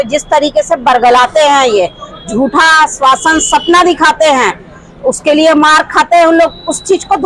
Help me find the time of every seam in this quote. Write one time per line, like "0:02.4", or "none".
none